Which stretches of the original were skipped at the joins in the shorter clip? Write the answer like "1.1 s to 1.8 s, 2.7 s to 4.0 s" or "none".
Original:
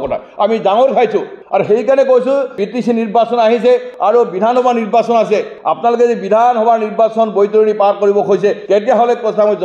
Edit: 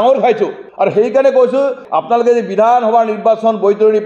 2.5 s to 5.5 s